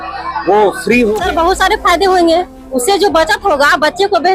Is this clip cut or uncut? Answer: cut